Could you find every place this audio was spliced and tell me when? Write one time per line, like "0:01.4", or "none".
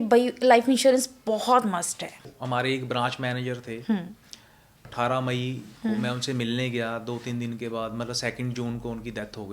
0:02.3
0:04.8